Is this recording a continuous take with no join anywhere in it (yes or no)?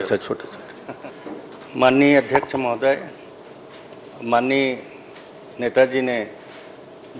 no